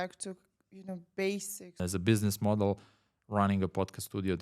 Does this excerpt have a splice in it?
yes; 1 cut; at 1.8 s

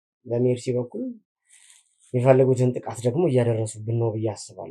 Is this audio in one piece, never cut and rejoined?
yes; 0 cuts

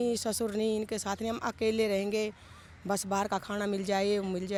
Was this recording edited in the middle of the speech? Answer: no; 0 cuts

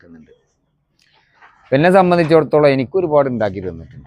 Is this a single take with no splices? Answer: yes; 0 cuts

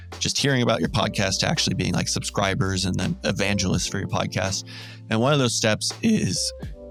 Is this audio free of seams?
yes; 0 cuts

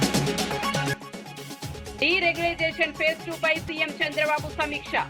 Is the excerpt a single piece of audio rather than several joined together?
no; 1 cut; at 0.9 s

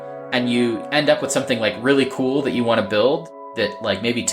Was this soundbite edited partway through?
yes; 2 cuts; at 0.8 s, 3.4 s

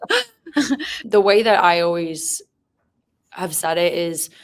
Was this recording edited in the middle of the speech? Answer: no; 0 cuts

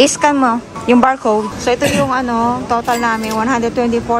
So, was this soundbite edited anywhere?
yes; 1 cut; at 1.5 s

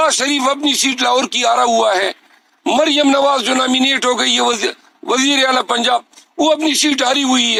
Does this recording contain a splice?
no; 0 cuts

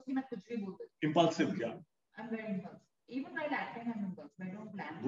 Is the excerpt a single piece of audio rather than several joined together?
yes; 0 cuts

